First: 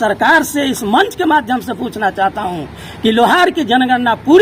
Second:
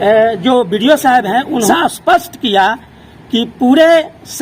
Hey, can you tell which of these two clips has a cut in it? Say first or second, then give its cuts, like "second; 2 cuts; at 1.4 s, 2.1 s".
second; 1 cut; at 1.7 s